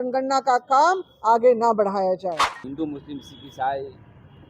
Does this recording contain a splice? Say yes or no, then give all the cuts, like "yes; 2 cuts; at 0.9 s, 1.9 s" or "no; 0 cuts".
yes; 1 cut; at 2.6 s